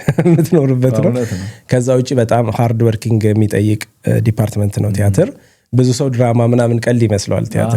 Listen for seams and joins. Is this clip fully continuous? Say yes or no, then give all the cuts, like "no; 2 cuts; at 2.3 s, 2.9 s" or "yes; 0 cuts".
yes; 0 cuts